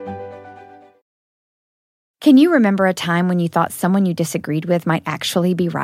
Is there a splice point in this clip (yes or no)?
no